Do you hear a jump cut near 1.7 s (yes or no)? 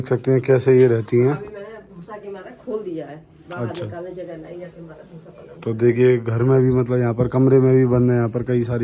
no